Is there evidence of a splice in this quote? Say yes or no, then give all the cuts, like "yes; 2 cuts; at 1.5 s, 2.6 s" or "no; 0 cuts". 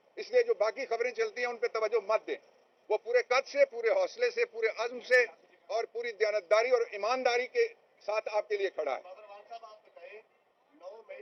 no; 0 cuts